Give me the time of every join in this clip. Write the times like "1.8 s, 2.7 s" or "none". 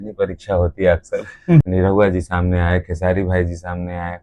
1.6 s

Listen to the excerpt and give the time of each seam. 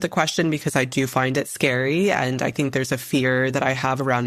2.5 s

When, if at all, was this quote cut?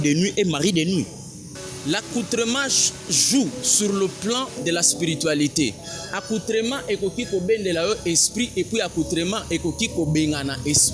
1.6 s

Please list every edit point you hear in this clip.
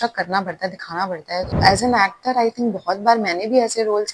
1.5 s

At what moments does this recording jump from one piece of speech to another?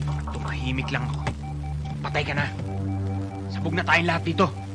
none

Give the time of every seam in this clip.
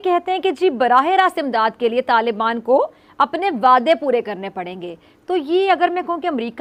none

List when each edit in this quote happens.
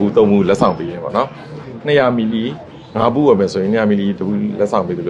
none

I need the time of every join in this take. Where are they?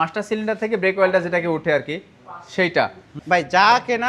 3.2 s

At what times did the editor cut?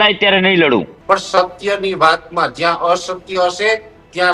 0.9 s

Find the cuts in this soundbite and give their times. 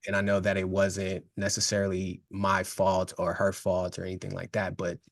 2.2 s

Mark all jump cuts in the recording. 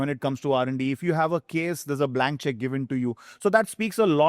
none

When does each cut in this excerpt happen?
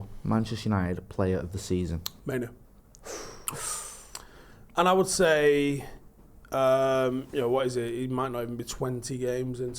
2.1 s

